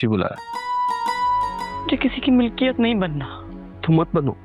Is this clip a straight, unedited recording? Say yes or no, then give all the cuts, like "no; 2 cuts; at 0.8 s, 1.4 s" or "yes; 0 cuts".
no; 1 cut; at 1.6 s